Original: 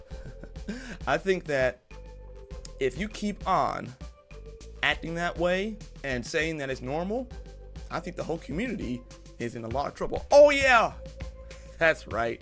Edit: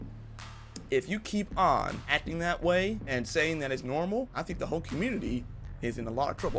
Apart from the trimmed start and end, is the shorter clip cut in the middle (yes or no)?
yes